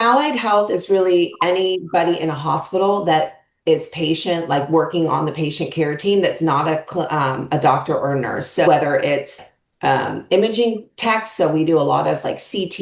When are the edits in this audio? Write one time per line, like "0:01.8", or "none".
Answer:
none